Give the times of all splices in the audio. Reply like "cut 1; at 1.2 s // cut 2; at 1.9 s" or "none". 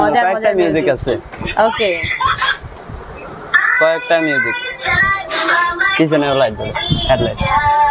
none